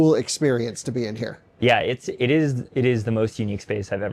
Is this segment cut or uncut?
uncut